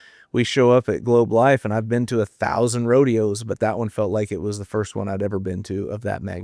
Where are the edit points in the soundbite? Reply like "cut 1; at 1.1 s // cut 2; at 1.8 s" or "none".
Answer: none